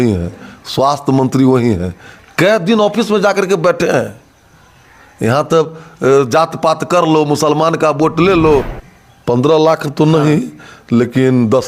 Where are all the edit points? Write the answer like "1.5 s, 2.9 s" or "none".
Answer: 8.8 s

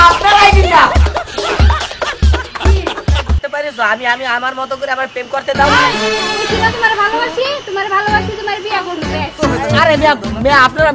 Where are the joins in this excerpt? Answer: 3.4 s, 9.4 s

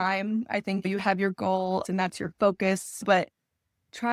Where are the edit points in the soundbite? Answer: 1.8 s

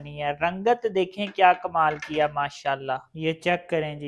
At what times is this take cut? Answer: 3.1 s

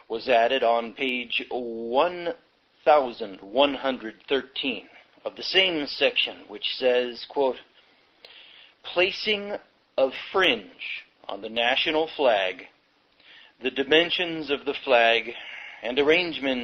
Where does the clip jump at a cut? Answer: 9.2 s

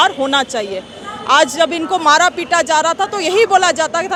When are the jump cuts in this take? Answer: none

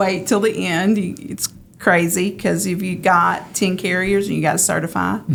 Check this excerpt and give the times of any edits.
none

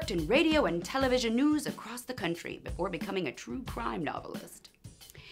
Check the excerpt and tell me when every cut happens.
1.3 s

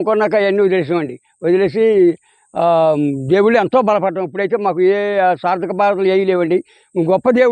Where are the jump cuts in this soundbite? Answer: none

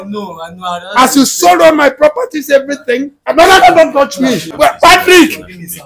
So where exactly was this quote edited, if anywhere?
3.2 s, 4.5 s

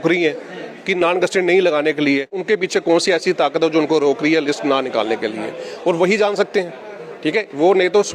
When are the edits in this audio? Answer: 2.4 s

